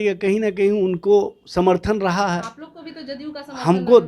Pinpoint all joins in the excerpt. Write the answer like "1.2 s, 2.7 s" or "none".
none